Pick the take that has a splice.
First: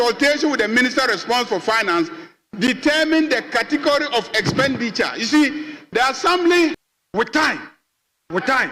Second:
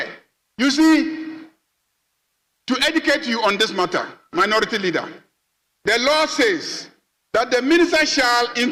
first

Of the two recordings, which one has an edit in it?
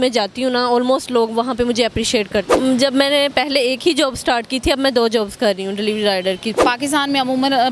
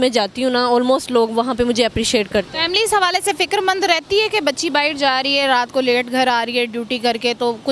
first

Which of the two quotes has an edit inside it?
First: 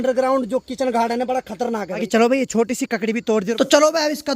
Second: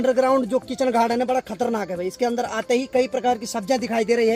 first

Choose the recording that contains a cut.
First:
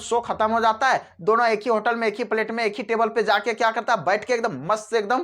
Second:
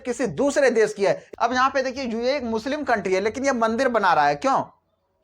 second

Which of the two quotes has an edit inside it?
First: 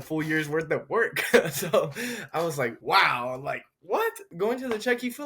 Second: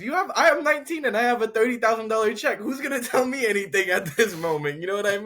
first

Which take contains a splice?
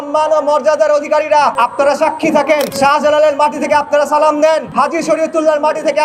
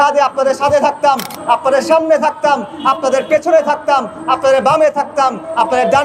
first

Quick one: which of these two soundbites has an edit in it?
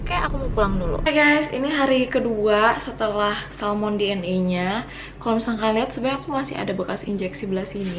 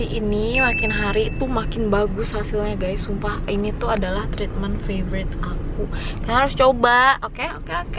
first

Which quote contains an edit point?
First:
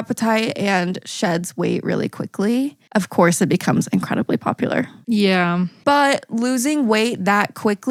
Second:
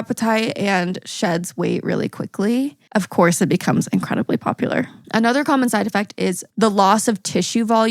second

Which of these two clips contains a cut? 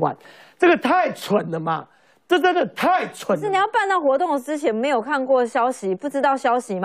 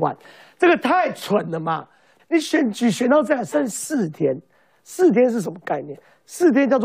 second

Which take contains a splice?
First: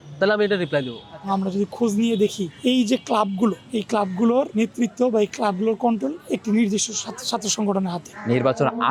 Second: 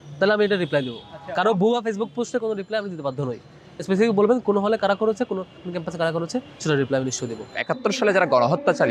first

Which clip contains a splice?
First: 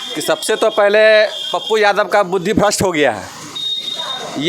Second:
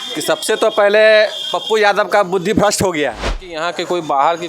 second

